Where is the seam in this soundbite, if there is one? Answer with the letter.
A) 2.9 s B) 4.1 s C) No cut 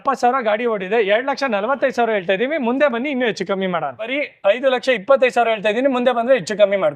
B